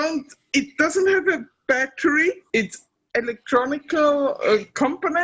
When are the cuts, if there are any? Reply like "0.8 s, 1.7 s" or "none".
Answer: 2.5 s